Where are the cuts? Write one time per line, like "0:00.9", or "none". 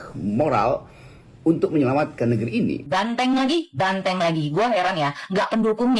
0:02.8